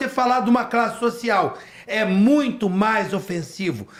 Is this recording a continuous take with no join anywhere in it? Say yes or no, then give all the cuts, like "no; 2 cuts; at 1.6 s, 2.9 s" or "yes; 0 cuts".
yes; 0 cuts